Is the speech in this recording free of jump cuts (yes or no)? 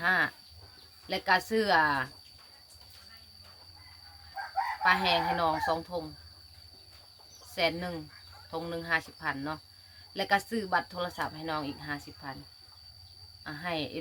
yes